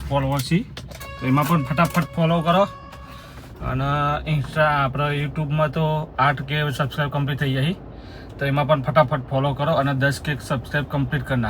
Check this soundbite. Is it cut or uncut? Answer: uncut